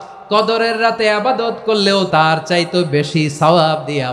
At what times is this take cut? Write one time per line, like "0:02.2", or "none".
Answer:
0:02.1